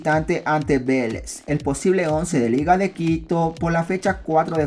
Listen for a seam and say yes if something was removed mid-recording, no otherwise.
no